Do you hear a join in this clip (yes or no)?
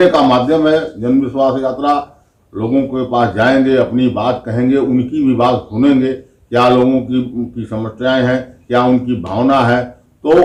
no